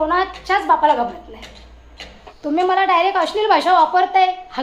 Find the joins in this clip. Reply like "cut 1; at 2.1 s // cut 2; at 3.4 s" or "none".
cut 1; at 2.1 s